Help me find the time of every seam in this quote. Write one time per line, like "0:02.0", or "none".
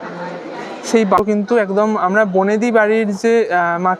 0:01.2